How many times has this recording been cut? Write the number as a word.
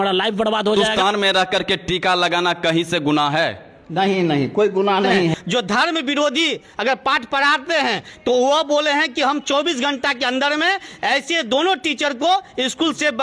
two